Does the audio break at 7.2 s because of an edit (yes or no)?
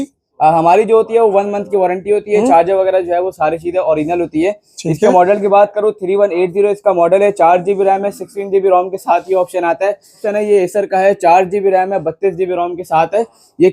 no